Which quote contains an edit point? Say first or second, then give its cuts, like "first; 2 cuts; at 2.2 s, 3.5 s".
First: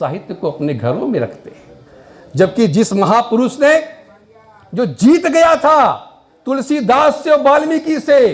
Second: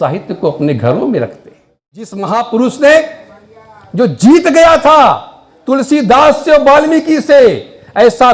second; 1 cut; at 2.2 s